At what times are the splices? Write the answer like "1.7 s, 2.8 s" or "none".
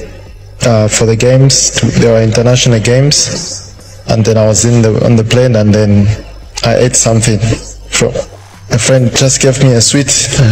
none